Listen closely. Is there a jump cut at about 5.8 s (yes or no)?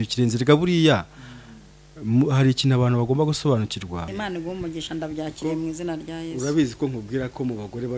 no